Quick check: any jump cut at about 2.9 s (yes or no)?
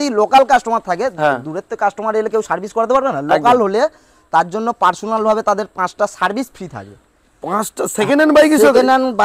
no